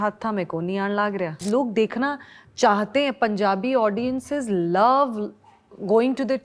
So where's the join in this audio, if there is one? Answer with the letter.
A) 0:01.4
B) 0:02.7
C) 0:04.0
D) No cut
A